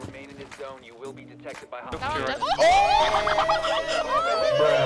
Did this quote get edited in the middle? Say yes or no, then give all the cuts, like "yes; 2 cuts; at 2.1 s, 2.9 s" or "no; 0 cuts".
no; 0 cuts